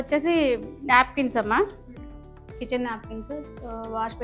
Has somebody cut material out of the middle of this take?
no; 0 cuts

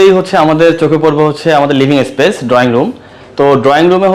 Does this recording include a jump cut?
no; 0 cuts

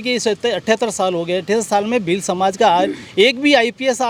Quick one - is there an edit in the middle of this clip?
no; 0 cuts

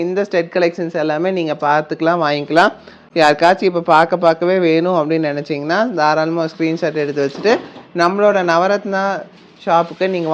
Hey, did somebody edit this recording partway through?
no; 0 cuts

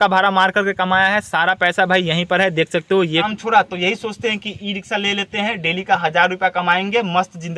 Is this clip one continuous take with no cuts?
no; 1 cut; at 3.3 s

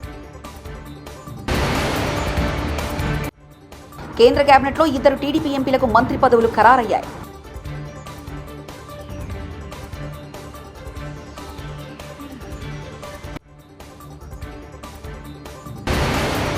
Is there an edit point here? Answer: yes; 1 cut; at 0.9 s

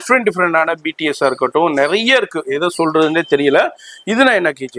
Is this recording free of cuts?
yes; 0 cuts

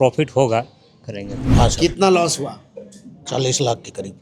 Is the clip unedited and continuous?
no; 1 cut; at 1.4 s

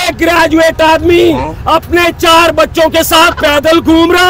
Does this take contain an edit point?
no; 0 cuts

